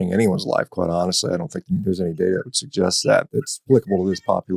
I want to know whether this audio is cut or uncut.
cut